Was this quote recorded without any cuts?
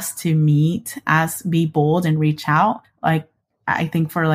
yes; 0 cuts

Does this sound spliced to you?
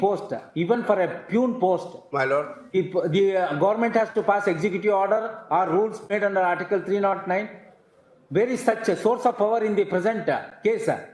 no; 0 cuts

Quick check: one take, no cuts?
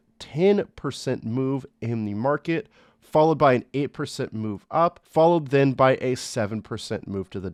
yes; 0 cuts

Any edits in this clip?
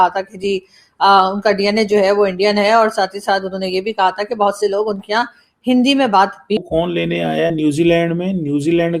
yes; 1 cut; at 6.6 s

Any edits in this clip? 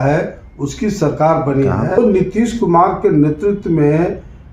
yes; 1 cut; at 2.0 s

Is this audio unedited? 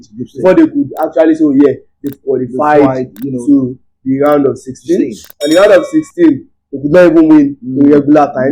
yes; 0 cuts

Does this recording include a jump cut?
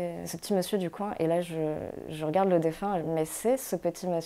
yes; 1 cut; at 3.0 s

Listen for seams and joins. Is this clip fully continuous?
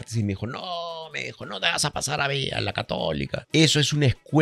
no; 1 cut; at 3.4 s

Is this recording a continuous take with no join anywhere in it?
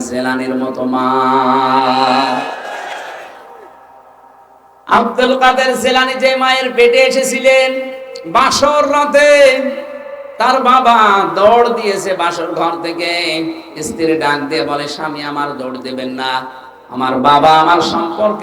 yes; 0 cuts

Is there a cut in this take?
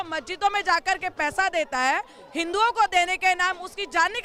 no; 0 cuts

